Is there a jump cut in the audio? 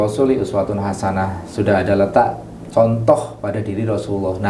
no; 0 cuts

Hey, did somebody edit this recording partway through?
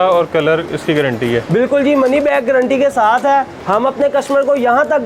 yes; 1 cut; at 3.6 s

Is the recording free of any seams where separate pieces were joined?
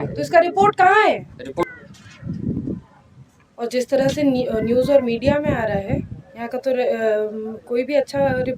no; 1 cut; at 1.6 s

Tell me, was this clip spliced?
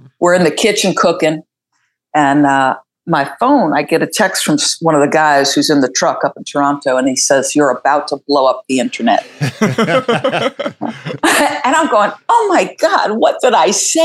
no; 0 cuts

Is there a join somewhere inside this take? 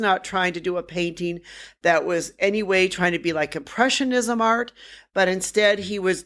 no; 0 cuts

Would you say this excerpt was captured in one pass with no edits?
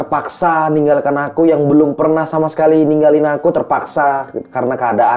yes; 0 cuts

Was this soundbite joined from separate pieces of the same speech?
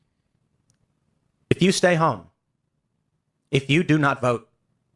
no; 0 cuts

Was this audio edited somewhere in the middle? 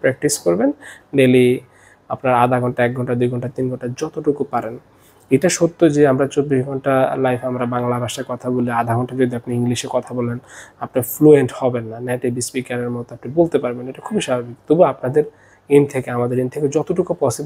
no; 0 cuts

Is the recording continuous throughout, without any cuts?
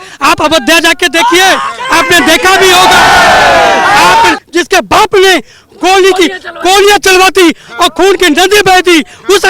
no; 1 cut; at 4.4 s

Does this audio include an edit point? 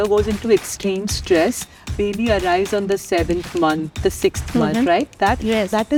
no; 0 cuts

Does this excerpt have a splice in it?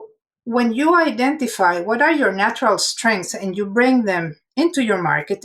yes; 1 cut; at 4.4 s

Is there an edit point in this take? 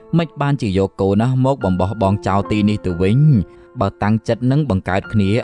yes; 1 cut; at 3.6 s

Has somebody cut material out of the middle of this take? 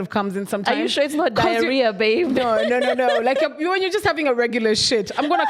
no; 0 cuts

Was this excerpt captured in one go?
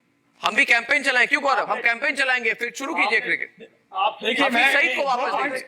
yes; 0 cuts

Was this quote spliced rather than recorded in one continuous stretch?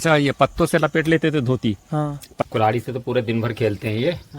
yes; 1 cut; at 2.4 s

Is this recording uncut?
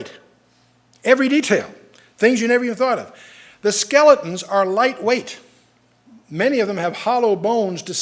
no; 1 cut; at 2.2 s

